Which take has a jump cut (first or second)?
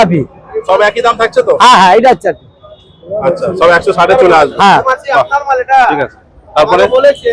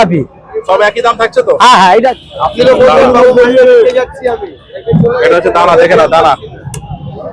second